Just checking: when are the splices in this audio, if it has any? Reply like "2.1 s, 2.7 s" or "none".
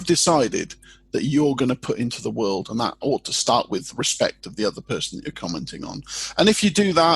3.0 s